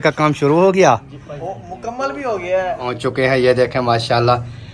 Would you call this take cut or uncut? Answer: cut